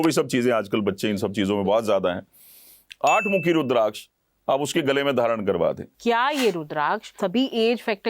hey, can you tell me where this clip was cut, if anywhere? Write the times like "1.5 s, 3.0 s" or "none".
5.9 s, 7.1 s

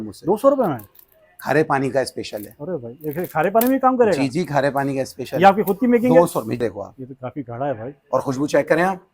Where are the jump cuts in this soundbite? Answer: 6.6 s

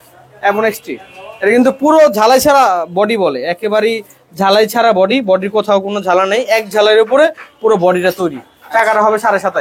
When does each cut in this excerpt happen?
none

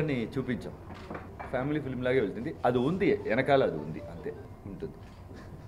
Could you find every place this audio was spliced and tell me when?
1.3 s, 4.5 s

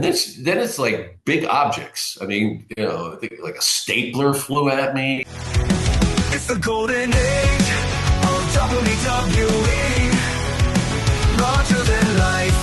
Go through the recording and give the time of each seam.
5.2 s

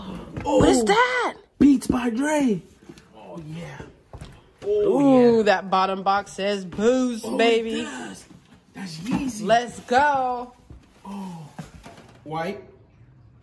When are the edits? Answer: 3.2 s, 12.1 s

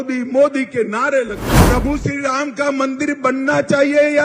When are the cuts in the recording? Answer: 1.5 s

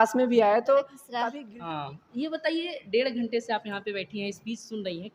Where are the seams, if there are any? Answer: 1.0 s

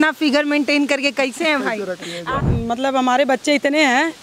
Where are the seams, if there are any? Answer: 2.3 s

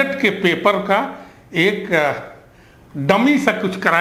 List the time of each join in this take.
none

